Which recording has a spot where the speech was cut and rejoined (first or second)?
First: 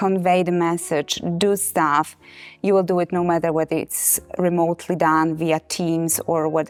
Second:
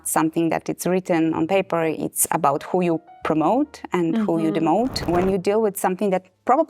second